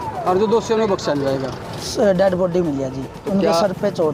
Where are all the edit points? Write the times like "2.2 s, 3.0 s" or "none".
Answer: 1.8 s